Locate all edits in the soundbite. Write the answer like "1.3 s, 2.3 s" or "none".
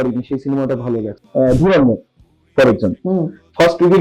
1.2 s